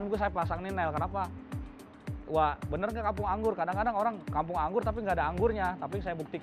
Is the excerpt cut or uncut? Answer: uncut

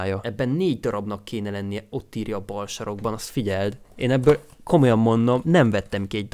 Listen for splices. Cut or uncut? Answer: cut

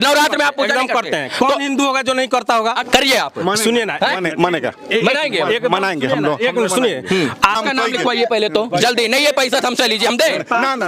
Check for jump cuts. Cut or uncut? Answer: cut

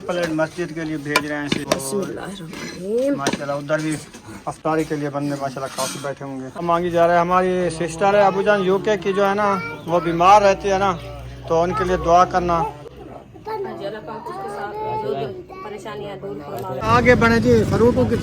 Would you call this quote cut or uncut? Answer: cut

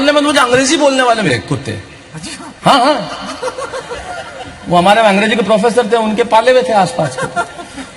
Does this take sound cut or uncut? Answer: cut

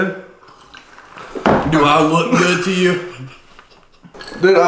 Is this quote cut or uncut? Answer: uncut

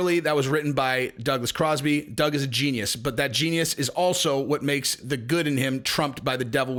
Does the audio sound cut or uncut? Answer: uncut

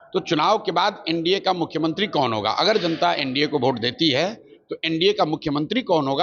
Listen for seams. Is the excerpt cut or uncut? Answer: uncut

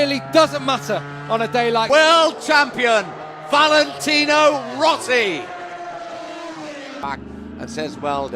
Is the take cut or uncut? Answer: uncut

